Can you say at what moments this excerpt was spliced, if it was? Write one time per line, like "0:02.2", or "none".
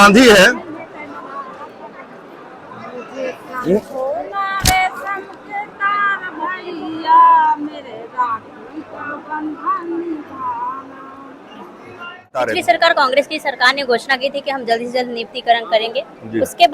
0:12.5